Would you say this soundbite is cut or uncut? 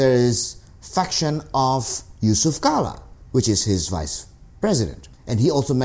uncut